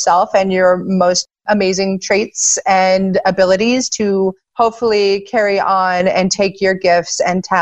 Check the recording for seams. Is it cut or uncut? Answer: cut